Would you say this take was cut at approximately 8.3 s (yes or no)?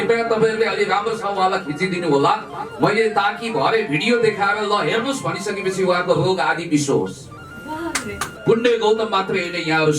yes